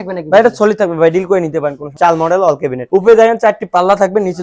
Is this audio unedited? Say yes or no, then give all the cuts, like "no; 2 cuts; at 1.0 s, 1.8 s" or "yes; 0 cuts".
no; 2 cuts; at 1.9 s, 2.8 s